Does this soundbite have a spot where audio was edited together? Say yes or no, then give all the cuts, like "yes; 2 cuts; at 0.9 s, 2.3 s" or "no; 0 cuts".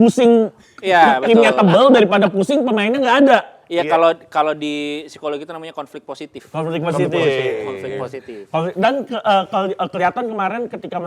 no; 0 cuts